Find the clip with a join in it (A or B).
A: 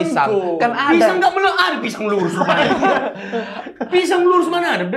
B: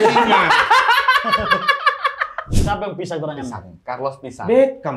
B